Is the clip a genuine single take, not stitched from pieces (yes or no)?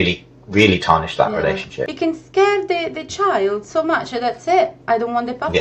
no